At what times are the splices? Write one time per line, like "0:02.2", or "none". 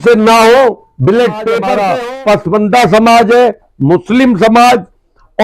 0:01.6

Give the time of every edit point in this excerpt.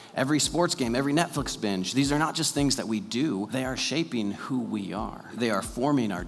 0:03.5
0:05.3

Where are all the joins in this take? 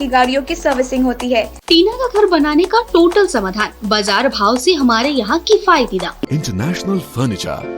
0:01.6
0:06.3

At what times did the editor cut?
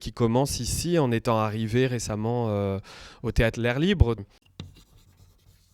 0:04.2

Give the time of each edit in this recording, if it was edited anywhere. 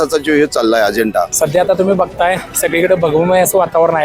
0:01.3

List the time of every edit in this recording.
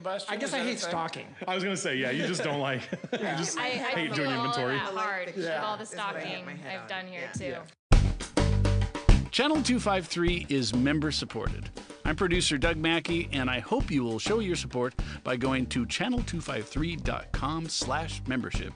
0:07.8

